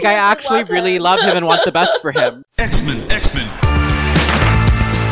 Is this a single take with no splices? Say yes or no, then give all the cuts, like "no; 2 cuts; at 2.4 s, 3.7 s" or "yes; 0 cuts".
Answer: no; 1 cut; at 2.4 s